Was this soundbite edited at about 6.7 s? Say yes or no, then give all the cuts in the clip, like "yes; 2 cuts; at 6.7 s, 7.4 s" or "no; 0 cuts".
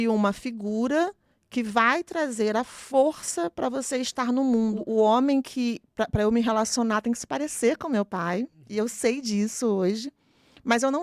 no; 1 cut; at 4.8 s